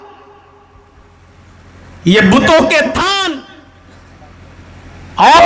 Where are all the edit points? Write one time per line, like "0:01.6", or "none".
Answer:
0:03.3